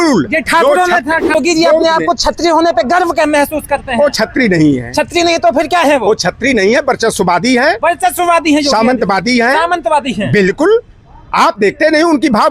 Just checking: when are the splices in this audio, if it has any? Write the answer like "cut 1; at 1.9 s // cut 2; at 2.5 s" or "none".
cut 1; at 1.3 s